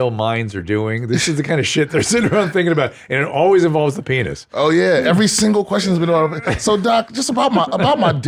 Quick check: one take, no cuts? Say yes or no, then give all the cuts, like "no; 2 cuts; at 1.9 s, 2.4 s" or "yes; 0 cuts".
yes; 0 cuts